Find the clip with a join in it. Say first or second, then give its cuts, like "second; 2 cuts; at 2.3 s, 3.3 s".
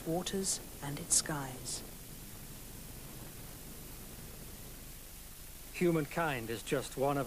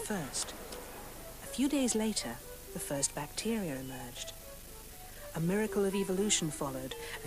second; 1 cut; at 2.5 s